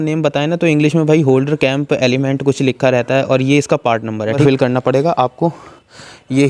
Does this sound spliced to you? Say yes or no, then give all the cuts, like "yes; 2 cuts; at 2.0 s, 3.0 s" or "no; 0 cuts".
yes; 1 cut; at 4.4 s